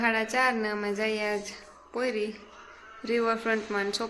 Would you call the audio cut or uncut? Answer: uncut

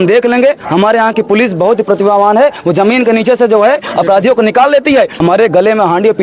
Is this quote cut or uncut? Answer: cut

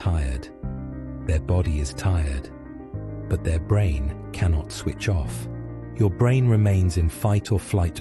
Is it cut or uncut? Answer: cut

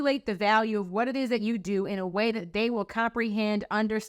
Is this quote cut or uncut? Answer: uncut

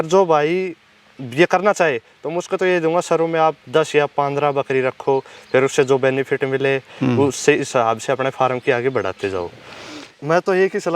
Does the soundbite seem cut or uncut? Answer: cut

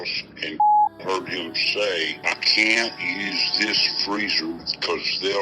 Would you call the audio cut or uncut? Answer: cut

